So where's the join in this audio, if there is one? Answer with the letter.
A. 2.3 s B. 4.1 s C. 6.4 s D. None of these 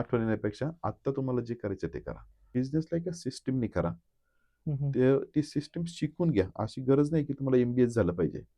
A